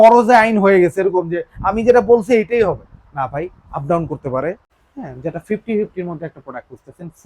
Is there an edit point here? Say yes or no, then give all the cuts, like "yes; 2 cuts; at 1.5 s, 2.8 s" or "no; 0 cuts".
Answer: yes; 1 cut; at 4.7 s